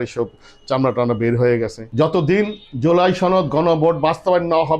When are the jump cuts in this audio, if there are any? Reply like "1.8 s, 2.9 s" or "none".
1.8 s